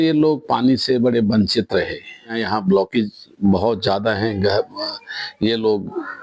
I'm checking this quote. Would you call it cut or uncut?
cut